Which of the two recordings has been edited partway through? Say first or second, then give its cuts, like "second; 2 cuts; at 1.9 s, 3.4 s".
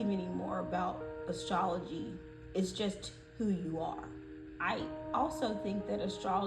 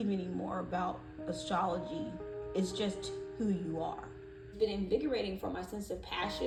first; 1 cut; at 4.4 s